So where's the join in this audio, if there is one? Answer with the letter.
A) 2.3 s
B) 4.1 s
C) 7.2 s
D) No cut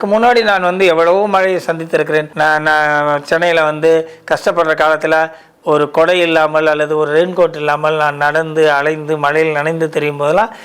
A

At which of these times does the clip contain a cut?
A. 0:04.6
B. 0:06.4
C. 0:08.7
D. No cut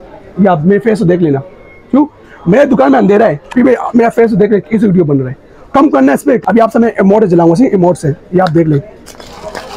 B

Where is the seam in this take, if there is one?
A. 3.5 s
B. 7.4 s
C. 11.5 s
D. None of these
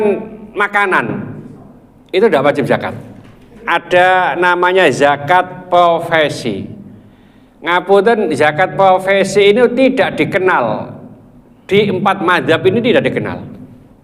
A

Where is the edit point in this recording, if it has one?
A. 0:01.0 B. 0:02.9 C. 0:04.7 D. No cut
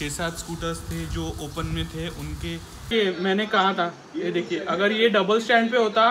B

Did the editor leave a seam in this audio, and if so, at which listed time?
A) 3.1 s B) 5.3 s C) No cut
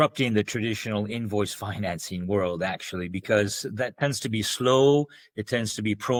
C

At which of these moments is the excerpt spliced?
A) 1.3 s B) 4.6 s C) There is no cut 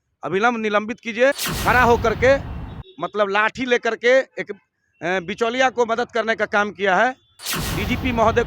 A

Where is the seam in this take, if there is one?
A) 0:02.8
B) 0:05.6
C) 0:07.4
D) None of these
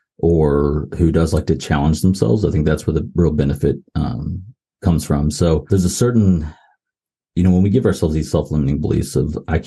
B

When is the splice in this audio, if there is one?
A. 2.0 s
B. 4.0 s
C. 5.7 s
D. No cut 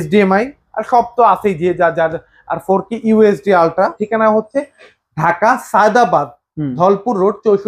B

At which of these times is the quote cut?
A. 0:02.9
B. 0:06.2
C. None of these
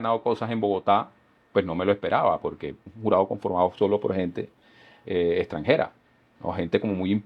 A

